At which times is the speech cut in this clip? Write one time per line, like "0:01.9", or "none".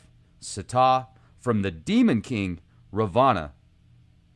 none